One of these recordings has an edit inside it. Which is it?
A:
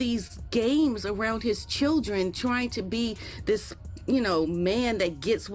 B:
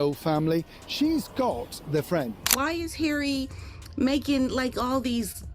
B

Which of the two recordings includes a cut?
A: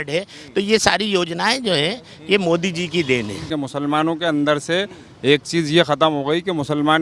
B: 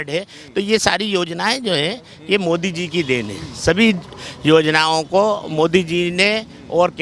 A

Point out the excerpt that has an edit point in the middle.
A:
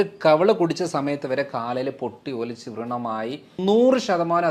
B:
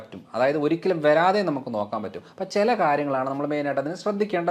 A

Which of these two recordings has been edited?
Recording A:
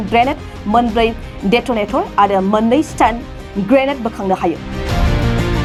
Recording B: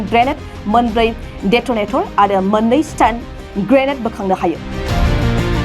B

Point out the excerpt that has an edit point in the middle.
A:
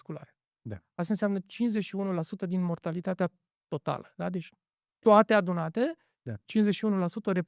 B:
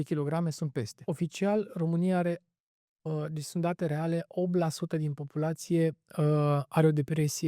B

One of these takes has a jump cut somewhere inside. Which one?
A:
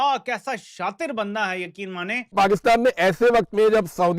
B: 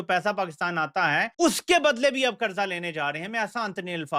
A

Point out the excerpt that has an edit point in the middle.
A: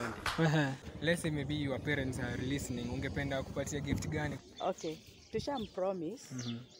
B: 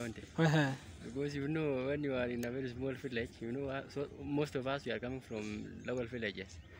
A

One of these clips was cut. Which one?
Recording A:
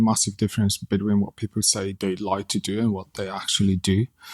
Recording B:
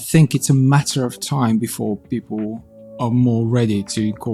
A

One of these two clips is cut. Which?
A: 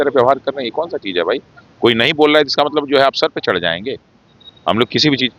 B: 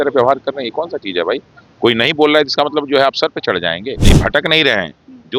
B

